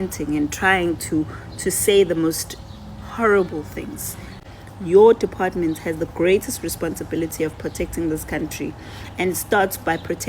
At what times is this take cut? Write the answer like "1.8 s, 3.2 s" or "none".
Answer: 4.4 s